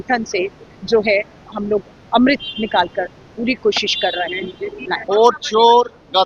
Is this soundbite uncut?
no; 1 cut; at 5.0 s

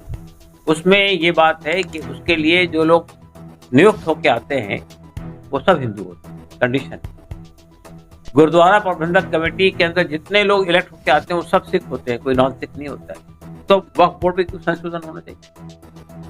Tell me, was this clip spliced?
yes; 1 cut; at 15.4 s

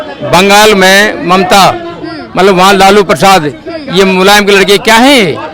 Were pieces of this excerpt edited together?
no; 0 cuts

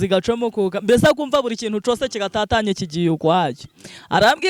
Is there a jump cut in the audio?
no; 0 cuts

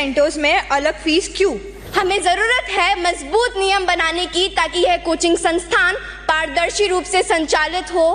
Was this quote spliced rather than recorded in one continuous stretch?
yes; 1 cut; at 1.7 s

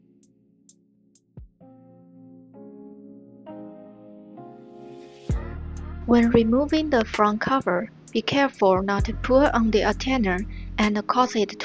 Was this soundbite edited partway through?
no; 0 cuts

